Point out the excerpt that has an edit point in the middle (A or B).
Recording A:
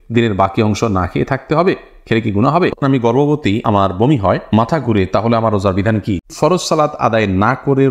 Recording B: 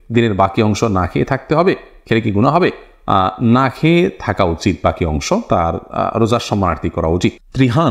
A